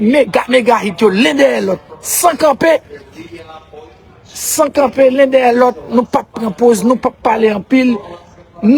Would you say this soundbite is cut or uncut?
uncut